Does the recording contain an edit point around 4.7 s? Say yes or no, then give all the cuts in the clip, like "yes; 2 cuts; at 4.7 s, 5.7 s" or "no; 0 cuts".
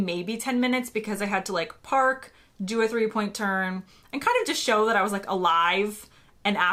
no; 0 cuts